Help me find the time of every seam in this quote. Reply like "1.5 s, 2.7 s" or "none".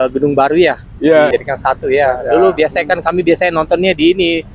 1.3 s